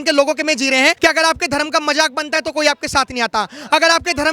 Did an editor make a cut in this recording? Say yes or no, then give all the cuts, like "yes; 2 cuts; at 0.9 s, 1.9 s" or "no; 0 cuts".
yes; 1 cut; at 1.0 s